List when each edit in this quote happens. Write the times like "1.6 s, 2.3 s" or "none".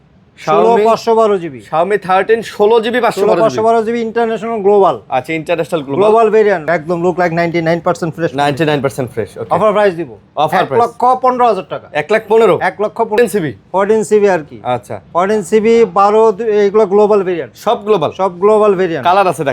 6.6 s, 13.2 s